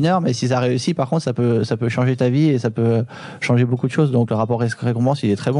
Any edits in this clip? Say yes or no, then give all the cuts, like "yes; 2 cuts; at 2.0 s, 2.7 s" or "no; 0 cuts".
yes; 1 cut; at 4.3 s